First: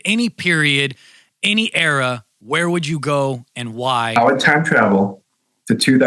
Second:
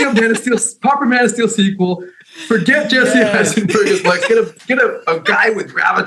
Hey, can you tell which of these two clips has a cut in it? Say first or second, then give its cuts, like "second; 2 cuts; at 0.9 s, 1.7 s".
first; 1 cut; at 4.1 s